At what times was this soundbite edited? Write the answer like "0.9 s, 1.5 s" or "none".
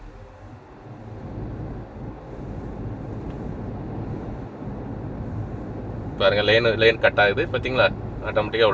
none